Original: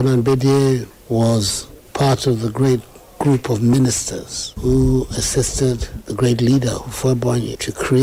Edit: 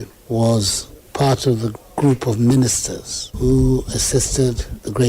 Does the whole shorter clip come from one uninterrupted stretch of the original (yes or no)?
no